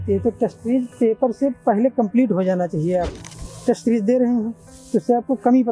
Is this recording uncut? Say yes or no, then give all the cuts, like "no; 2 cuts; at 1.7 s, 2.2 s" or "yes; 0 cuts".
no; 1 cut; at 3.1 s